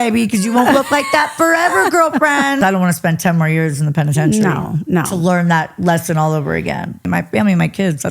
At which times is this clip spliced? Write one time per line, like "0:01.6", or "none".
0:02.6
0:07.0

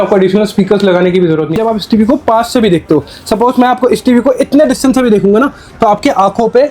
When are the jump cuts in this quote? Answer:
0:01.5

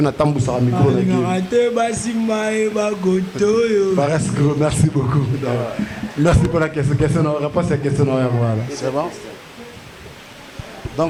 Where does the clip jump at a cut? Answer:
none

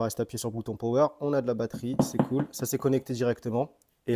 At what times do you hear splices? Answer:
none

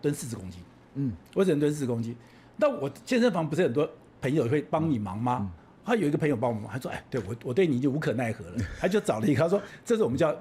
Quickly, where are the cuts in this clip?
none

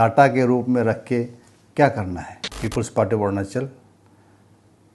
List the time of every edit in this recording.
0:02.6

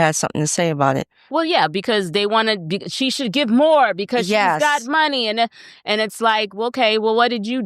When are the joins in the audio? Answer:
none

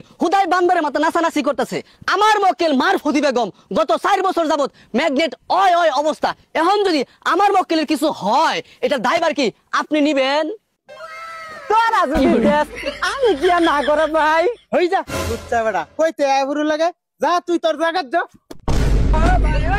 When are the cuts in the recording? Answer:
none

